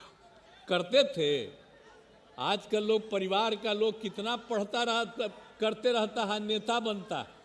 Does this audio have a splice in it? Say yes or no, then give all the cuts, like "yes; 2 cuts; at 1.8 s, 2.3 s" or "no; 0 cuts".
no; 0 cuts